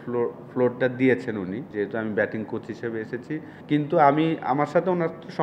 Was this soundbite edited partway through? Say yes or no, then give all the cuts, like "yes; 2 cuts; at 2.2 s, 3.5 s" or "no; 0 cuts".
yes; 2 cuts; at 1.7 s, 3.5 s